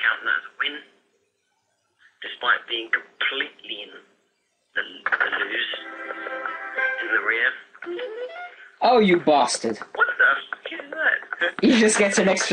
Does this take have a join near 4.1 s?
yes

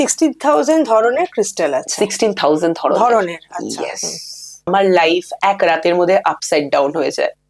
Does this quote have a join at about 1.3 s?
no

